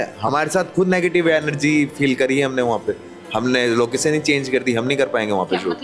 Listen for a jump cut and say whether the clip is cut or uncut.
uncut